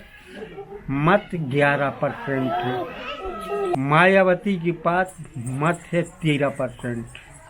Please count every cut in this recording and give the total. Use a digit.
1